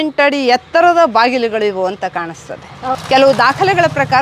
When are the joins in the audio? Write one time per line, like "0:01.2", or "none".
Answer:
0:02.9

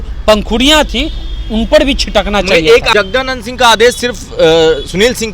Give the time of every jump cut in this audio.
0:02.9

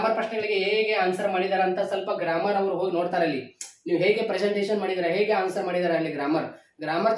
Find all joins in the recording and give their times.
none

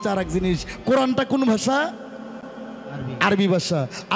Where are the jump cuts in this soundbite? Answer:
none

